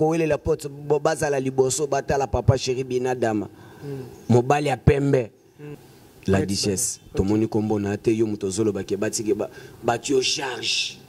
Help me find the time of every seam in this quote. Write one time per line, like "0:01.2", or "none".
0:05.5